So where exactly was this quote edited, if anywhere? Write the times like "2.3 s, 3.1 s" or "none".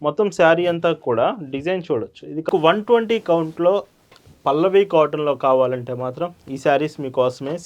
2.5 s